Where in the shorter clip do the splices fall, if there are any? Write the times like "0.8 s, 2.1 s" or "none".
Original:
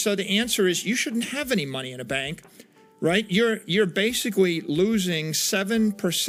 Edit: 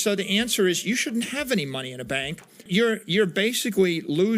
2.7 s